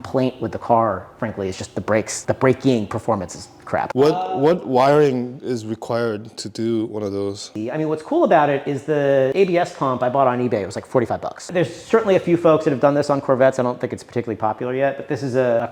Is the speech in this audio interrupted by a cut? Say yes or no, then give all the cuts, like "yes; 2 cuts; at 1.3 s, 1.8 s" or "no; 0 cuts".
no; 0 cuts